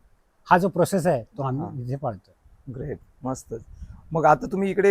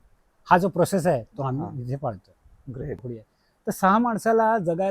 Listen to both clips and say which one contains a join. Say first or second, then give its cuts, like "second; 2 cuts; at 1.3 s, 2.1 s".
second; 1 cut; at 3.1 s